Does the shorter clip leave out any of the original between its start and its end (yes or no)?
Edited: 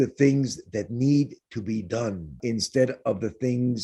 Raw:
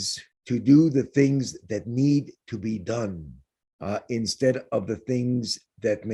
yes